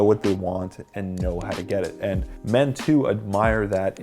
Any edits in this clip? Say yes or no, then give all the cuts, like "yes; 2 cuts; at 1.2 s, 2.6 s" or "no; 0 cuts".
no; 0 cuts